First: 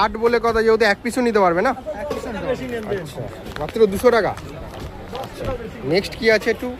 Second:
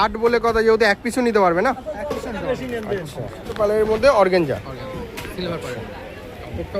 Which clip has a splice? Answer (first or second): second